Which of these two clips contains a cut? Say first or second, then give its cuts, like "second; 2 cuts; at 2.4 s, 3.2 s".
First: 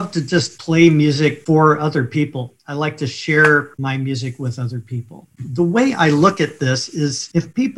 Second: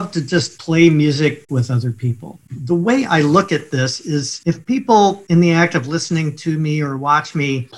second; 1 cut; at 1.4 s